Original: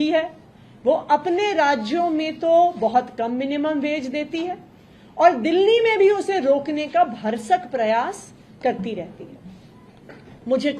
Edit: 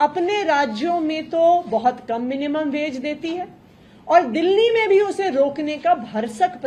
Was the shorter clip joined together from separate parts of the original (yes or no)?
no